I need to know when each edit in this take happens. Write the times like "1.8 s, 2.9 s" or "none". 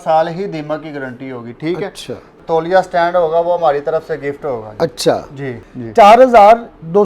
2.4 s, 5.7 s